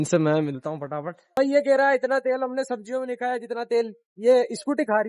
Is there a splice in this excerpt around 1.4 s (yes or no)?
yes